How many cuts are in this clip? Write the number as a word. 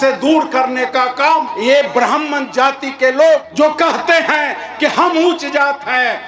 two